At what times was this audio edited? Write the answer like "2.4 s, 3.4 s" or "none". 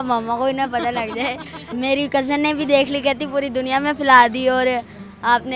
1.7 s